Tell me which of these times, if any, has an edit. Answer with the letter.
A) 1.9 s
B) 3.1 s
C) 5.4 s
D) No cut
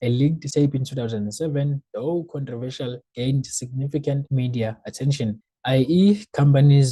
C